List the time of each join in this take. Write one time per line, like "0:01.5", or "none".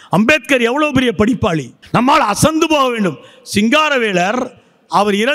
0:01.8